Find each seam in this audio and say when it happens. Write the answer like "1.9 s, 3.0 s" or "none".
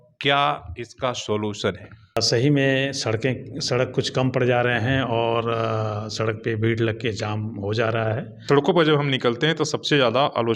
2.2 s, 8.3 s